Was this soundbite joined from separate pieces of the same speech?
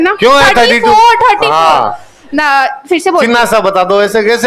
no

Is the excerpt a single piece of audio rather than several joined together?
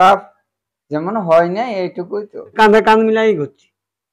no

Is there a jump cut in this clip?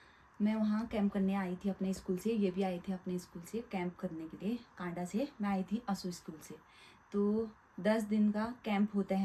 no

